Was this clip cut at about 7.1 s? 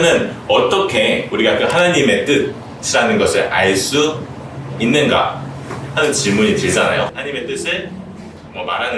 yes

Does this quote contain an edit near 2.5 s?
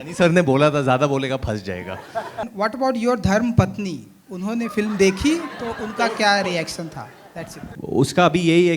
yes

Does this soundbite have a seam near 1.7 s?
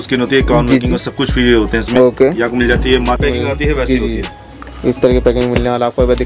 no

